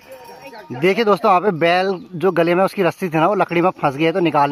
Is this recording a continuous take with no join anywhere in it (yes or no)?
yes